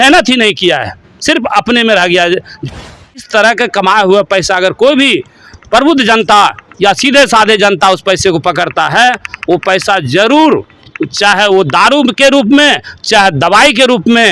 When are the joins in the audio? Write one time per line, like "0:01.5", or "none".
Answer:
0:02.7